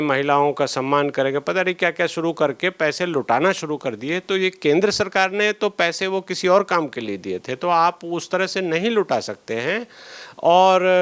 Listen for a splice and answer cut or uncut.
uncut